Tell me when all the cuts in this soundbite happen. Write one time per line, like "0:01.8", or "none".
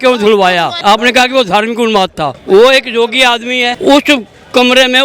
0:00.8
0:02.3
0:03.7